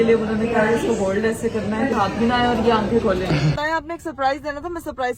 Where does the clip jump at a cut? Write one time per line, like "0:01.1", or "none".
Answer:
0:01.9
0:03.6